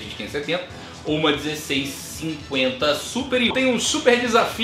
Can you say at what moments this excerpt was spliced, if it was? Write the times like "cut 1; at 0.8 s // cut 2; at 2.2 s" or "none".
cut 1; at 3.5 s